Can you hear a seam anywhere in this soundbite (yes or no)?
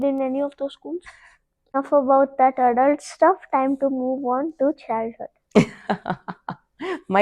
yes